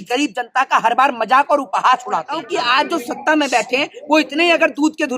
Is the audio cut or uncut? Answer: cut